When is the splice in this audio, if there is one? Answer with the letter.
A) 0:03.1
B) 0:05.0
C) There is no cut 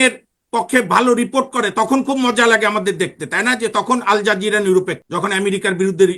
B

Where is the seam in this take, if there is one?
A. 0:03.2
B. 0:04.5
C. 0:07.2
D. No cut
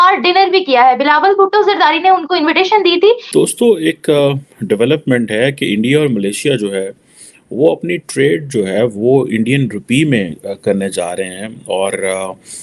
A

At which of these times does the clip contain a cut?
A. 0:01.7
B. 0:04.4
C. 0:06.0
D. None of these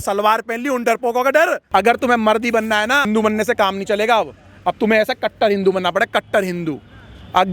A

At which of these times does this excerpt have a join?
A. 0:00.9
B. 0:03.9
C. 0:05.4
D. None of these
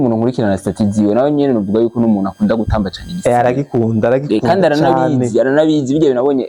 D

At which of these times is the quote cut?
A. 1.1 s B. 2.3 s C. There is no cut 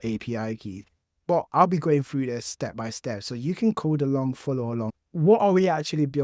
C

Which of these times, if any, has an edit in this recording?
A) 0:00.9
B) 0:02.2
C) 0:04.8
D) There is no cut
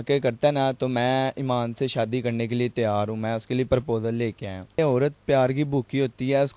C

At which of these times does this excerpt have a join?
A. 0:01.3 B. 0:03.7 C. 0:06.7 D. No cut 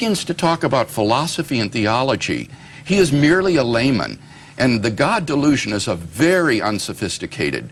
D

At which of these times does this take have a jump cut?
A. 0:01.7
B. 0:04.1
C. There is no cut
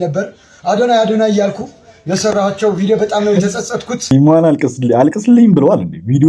B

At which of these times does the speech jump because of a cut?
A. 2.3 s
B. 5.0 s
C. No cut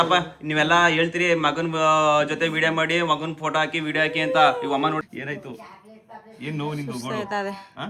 B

